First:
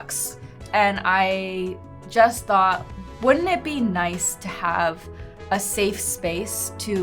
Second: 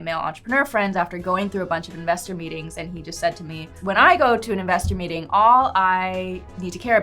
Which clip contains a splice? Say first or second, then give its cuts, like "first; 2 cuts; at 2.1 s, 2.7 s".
second; 1 cut; at 3.7 s